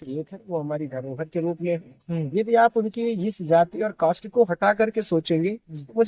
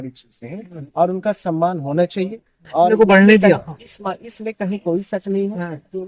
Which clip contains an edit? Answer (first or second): second